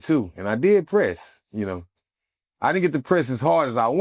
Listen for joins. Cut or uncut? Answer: uncut